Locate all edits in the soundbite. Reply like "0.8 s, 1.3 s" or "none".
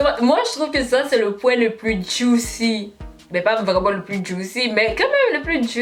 none